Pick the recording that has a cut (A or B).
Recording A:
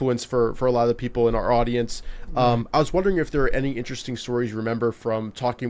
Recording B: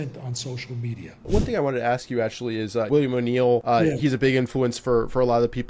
B